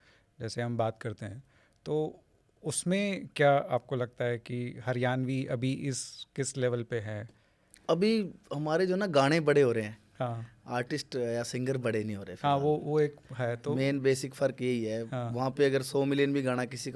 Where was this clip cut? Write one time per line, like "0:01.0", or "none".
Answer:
none